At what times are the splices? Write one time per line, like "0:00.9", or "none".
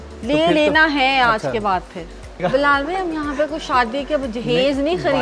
0:02.4

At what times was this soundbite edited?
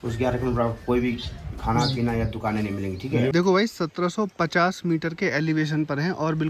0:03.3

